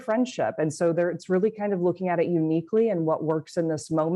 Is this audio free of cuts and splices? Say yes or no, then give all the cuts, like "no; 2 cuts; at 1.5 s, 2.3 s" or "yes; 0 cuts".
yes; 0 cuts